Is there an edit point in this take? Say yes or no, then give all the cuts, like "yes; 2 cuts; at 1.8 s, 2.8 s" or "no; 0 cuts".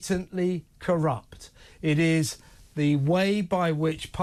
no; 0 cuts